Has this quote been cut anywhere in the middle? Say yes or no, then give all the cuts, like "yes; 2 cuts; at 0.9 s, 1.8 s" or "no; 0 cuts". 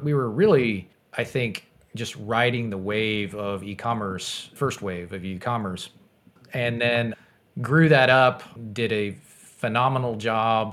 yes; 1 cut; at 1.0 s